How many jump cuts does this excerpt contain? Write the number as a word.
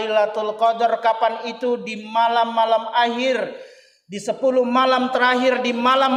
zero